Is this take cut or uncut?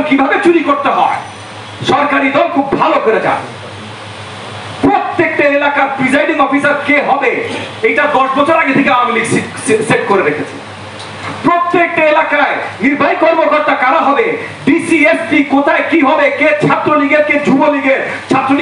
uncut